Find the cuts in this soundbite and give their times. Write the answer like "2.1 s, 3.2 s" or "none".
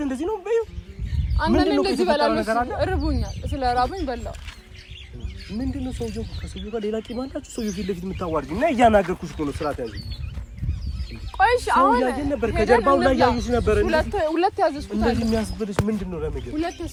none